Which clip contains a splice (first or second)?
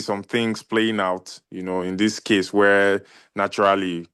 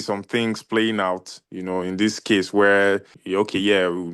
second